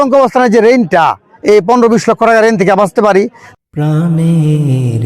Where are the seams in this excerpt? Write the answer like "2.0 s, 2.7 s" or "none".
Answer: 3.4 s